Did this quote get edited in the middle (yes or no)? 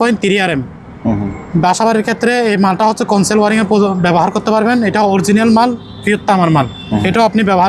no